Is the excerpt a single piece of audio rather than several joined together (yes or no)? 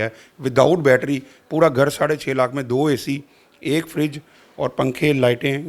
yes